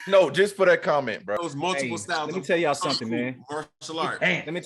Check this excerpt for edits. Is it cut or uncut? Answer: cut